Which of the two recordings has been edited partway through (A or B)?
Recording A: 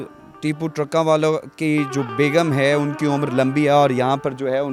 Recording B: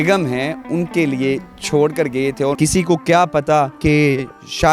B